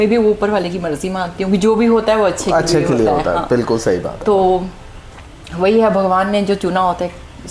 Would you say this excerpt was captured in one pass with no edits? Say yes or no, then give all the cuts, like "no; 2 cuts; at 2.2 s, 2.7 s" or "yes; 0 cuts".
yes; 0 cuts